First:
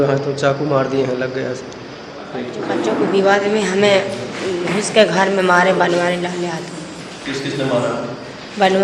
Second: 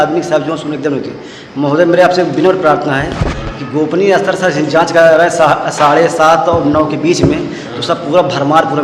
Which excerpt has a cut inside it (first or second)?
first